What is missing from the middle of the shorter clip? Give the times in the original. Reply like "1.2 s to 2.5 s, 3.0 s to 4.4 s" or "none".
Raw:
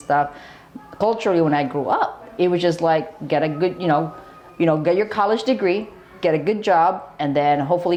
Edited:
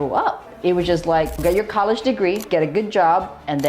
3.1 s to 4.8 s, 5.8 s to 6.1 s